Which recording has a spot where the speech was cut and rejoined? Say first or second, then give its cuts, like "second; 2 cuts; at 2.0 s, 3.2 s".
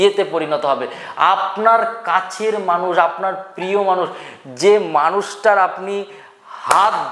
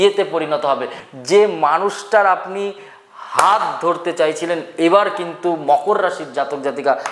second; 1 cut; at 1.0 s